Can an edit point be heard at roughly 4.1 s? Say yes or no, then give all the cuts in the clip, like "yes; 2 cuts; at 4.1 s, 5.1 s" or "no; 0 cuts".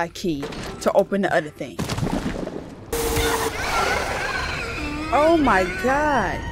no; 1 cut; at 2.9 s